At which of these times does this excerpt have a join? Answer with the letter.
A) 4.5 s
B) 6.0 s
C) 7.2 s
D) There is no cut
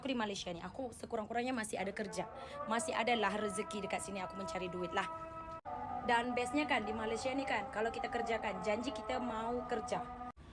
D